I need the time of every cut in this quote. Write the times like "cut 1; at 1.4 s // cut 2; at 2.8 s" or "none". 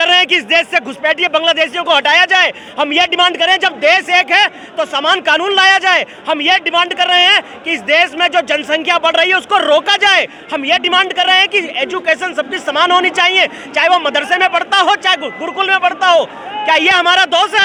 none